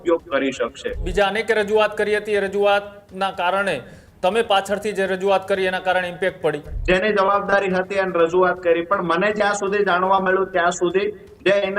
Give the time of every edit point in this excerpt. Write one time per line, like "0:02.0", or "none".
0:01.1
0:06.7